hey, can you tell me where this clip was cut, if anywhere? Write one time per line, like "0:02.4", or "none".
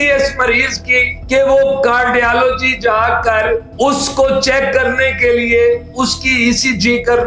0:01.1